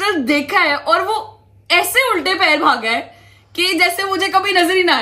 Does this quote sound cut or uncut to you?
uncut